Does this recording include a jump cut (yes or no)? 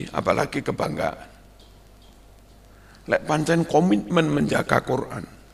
no